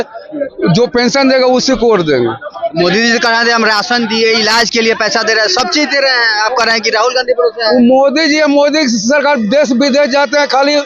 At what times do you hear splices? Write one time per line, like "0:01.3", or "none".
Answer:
none